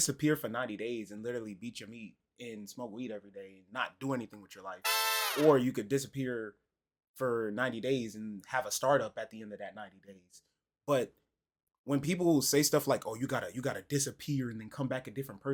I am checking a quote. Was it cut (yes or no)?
no